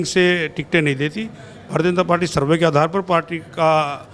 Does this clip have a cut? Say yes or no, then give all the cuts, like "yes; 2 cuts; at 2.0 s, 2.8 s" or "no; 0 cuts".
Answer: no; 0 cuts